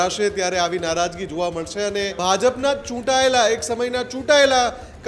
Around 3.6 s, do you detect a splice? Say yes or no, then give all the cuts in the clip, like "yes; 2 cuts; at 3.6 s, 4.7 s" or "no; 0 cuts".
no; 1 cut; at 2.1 s